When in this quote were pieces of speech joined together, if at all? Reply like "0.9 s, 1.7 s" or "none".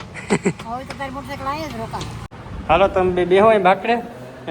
2.2 s